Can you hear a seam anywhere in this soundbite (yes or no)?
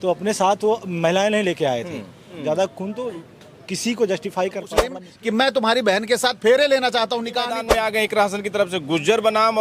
yes